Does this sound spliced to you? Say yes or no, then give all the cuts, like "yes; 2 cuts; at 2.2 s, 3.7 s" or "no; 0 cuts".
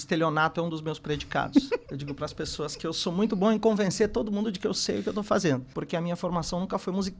yes; 2 cuts; at 1.8 s, 5.7 s